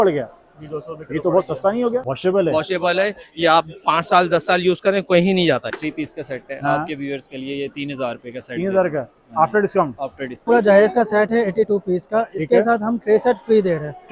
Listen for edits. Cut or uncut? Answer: cut